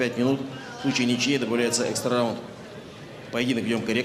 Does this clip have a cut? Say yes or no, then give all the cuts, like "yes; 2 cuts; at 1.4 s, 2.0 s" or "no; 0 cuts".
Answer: yes; 1 cut; at 2.3 s